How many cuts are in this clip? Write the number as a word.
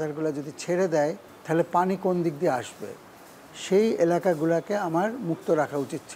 one